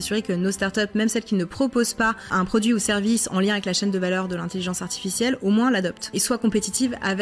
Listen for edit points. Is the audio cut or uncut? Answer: cut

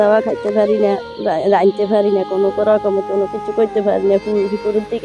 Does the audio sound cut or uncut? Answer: uncut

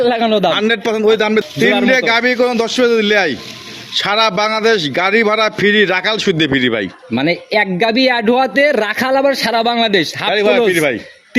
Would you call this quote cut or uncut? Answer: cut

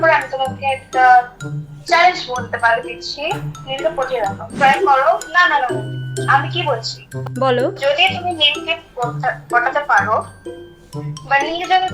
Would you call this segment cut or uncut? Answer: cut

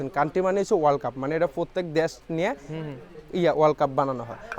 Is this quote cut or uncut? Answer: uncut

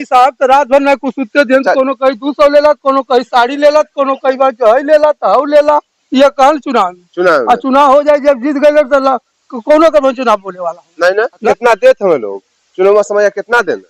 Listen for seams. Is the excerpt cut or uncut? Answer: cut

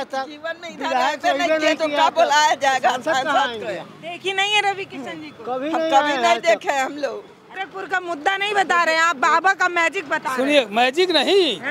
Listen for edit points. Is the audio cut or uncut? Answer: cut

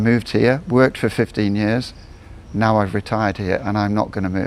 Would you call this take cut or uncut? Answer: uncut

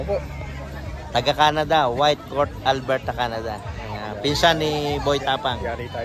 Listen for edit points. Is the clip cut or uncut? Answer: uncut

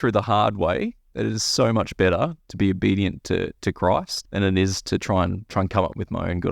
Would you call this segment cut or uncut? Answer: cut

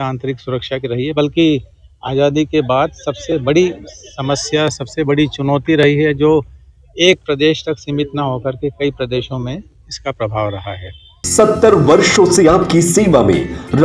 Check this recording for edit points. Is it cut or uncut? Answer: cut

